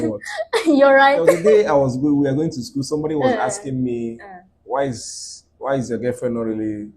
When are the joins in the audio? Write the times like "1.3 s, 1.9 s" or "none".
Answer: 1.2 s